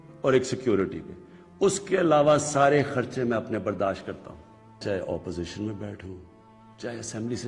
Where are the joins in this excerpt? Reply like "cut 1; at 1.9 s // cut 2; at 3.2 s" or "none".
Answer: cut 1; at 4.8 s